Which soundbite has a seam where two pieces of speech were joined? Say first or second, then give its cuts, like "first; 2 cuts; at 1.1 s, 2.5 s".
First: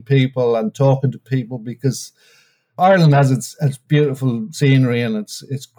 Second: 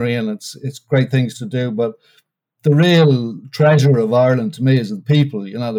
first; 2 cuts; at 2.8 s, 3.8 s